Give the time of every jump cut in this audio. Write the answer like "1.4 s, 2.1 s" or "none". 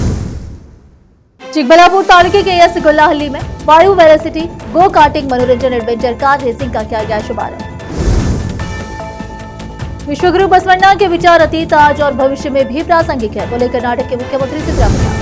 1.3 s